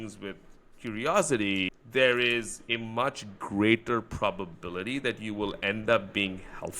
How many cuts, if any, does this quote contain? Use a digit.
1